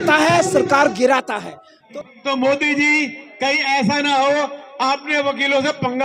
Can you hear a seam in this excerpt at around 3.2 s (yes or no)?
no